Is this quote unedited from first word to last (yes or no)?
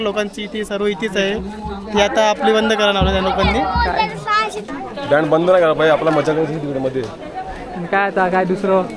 yes